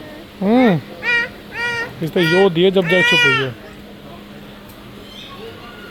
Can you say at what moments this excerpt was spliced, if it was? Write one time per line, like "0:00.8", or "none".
none